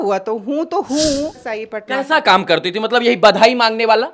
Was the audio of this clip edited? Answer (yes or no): yes